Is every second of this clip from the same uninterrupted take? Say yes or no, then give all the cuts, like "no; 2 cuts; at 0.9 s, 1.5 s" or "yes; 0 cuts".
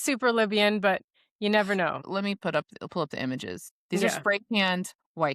no; 1 cut; at 3.8 s